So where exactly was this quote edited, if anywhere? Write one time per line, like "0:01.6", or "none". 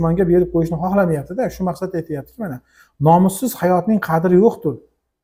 none